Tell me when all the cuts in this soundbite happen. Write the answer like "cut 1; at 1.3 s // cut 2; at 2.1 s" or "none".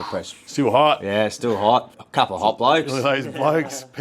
cut 1; at 2.0 s